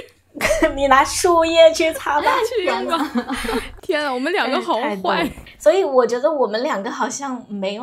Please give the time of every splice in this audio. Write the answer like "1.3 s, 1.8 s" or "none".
3.7 s, 5.5 s